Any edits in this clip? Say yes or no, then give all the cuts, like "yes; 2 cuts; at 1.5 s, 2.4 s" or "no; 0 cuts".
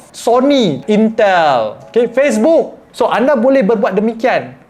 yes; 2 cuts; at 0.8 s, 2.8 s